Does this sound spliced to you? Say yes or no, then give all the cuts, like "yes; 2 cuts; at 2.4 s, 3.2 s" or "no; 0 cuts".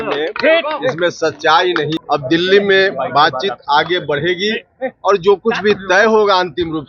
yes; 1 cut; at 2.0 s